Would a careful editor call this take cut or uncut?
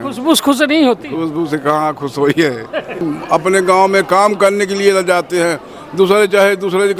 cut